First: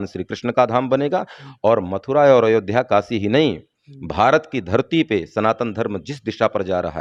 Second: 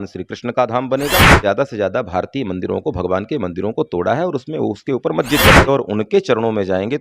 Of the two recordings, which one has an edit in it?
second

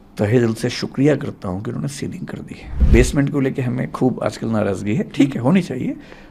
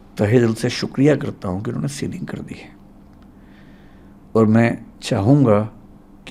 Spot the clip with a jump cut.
first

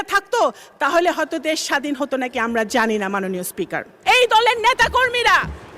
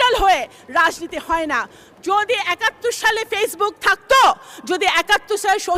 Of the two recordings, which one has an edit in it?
first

